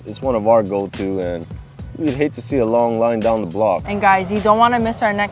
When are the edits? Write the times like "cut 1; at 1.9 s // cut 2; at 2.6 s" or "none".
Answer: cut 1; at 3.9 s